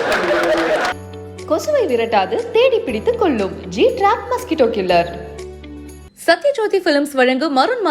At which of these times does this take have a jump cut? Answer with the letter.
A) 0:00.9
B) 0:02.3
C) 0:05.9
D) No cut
A